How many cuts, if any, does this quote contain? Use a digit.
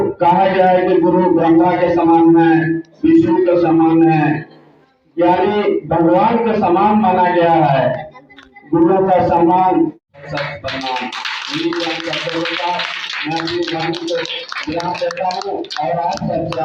1